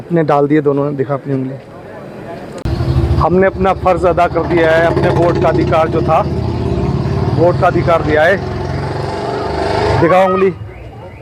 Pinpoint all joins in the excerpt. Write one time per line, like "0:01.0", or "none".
none

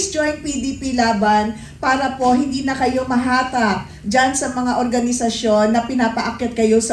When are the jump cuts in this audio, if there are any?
none

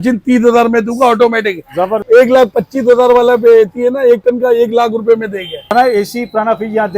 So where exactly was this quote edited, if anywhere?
0:02.0
0:05.7

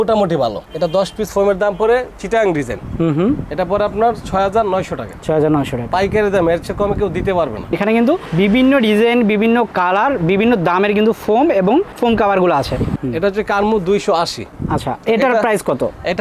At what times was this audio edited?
0:07.8
0:12.9
0:14.5

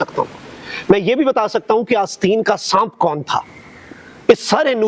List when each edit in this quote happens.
none

